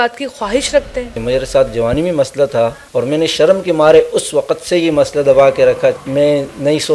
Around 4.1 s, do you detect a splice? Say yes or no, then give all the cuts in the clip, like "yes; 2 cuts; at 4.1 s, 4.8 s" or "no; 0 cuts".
no; 3 cuts; at 1.1 s, 2.8 s, 6.0 s